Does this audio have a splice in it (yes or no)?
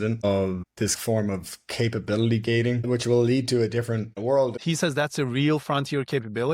yes